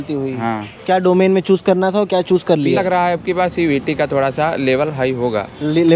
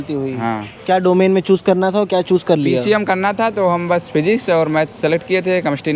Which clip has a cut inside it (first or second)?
first